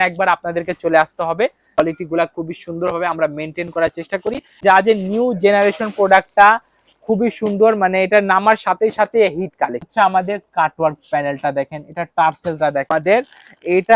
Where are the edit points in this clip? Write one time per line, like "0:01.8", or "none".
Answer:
0:01.8
0:04.6
0:09.9
0:12.9

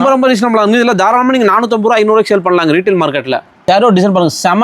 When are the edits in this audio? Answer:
0:03.6

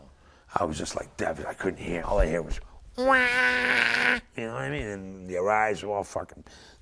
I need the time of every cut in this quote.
none

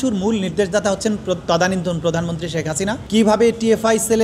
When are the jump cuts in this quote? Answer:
0:03.0

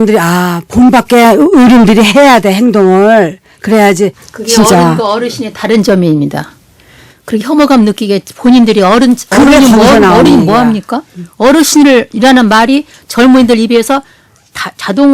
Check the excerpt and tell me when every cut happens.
0:04.3

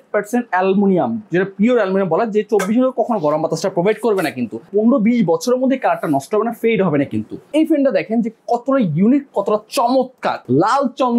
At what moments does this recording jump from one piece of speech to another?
0:04.7
0:07.4
0:10.4

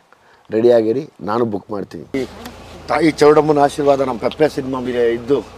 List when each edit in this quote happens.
0:02.1

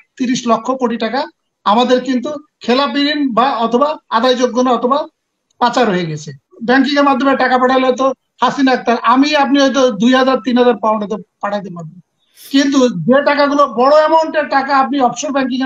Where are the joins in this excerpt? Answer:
0:06.5

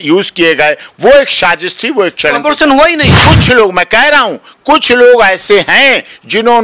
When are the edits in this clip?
0:03.1

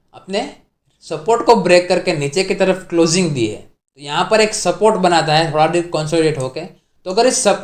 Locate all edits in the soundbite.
none

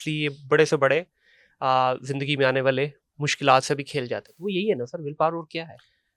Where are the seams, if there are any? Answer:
none

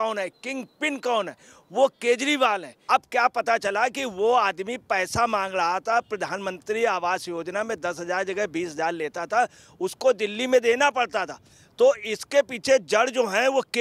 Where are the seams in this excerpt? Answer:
0:02.8

